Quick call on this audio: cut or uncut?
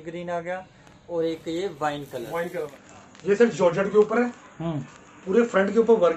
cut